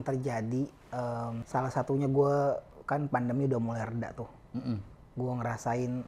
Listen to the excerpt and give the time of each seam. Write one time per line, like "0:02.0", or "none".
0:01.4

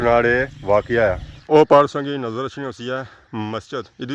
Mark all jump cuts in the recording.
0:01.3

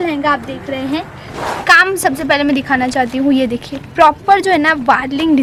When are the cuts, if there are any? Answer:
none

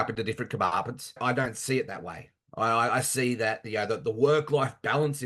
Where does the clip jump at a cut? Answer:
0:01.2

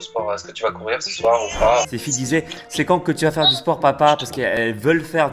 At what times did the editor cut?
0:02.4

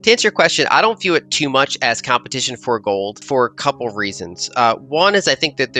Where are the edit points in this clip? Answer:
0:03.2

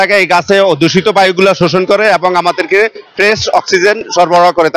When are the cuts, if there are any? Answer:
none

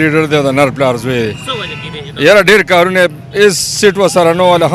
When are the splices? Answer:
none

